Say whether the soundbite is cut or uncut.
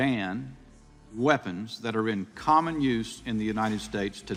uncut